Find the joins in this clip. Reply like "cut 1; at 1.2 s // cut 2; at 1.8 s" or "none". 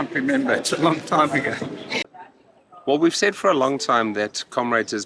cut 1; at 2.0 s